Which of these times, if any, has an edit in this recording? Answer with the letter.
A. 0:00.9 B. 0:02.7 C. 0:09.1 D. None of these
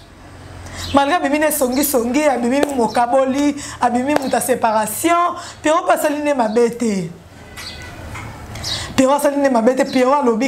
D